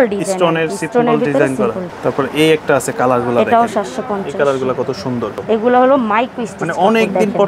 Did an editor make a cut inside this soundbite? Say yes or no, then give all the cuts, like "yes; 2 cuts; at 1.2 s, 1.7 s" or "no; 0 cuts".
yes; 2 cuts; at 1.9 s, 5.4 s